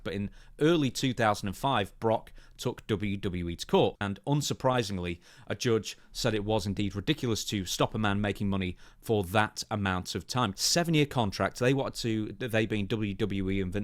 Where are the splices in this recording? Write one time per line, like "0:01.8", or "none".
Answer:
0:04.1
0:10.5